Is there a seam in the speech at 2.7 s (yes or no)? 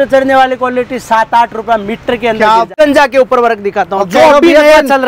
yes